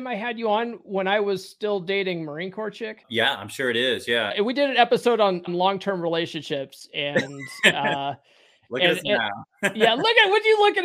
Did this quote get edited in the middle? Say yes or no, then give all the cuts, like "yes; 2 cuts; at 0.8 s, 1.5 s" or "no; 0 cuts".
yes; 3 cuts; at 3.0 s, 4.3 s, 5.5 s